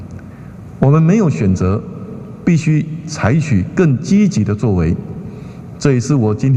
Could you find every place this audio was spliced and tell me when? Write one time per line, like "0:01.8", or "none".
none